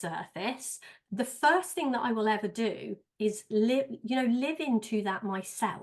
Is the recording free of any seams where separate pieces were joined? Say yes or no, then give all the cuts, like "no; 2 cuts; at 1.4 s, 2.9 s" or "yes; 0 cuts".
no; 1 cut; at 0.9 s